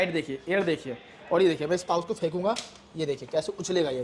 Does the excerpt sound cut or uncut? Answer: uncut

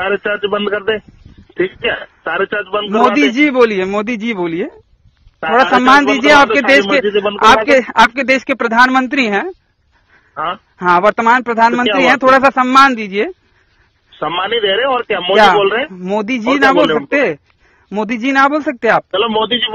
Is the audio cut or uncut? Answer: uncut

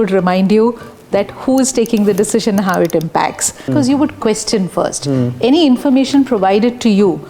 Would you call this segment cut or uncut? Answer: cut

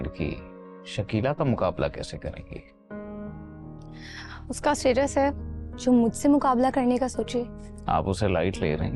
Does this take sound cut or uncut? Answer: uncut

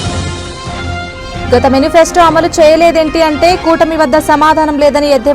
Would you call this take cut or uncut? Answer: cut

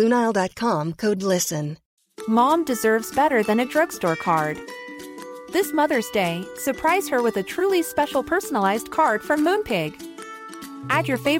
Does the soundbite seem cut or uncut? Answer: cut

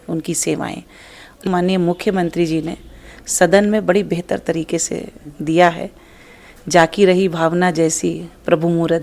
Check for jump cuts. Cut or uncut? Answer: cut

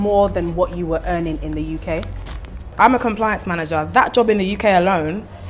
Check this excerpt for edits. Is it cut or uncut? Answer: cut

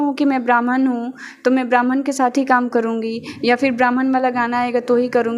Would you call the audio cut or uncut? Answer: uncut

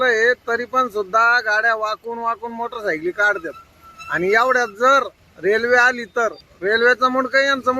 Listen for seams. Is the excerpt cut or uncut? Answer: cut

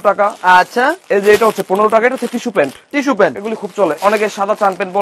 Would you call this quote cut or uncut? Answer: cut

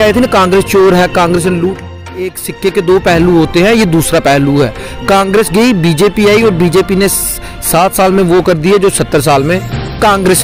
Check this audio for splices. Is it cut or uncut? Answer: cut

